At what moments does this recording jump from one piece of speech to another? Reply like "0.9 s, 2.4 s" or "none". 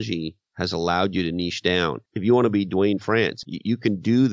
2.1 s, 3.4 s